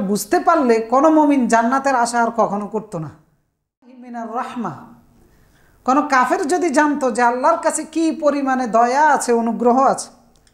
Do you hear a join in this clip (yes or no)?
yes